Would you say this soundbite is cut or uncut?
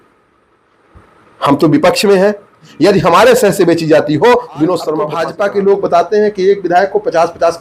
cut